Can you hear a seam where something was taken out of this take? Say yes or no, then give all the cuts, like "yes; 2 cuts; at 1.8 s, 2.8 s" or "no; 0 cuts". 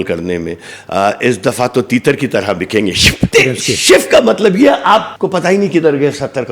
yes; 2 cuts; at 3.3 s, 5.1 s